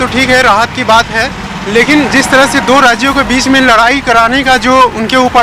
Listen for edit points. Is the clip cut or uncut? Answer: uncut